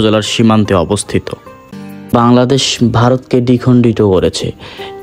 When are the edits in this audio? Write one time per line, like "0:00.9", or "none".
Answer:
0:02.1